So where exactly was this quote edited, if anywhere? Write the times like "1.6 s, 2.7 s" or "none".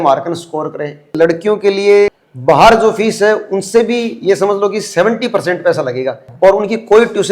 1.1 s, 2.3 s